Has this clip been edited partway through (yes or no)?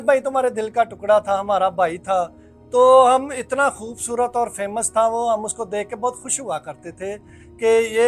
no